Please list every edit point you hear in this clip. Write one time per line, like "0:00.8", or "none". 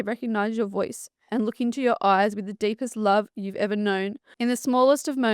0:04.2